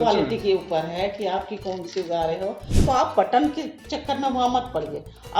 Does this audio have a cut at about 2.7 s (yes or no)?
yes